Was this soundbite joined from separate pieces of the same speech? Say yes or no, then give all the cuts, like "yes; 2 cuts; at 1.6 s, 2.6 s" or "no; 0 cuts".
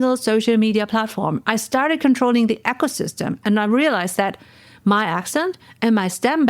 no; 0 cuts